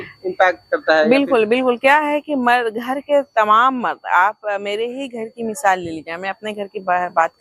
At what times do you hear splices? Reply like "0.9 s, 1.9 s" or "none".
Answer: none